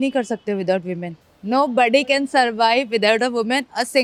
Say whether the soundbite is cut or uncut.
uncut